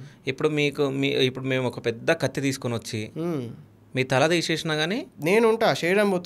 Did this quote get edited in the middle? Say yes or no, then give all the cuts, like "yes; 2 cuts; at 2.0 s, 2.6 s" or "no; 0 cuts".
yes; 1 cut; at 5.1 s